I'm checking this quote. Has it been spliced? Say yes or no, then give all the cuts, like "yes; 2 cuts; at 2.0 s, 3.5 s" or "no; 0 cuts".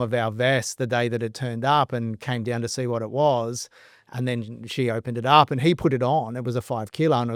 no; 0 cuts